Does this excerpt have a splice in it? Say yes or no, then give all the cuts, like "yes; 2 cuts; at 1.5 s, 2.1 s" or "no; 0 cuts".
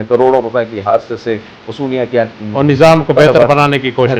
no; 0 cuts